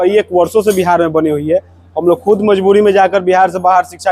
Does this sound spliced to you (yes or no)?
no